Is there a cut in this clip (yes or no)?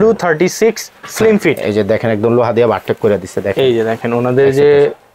no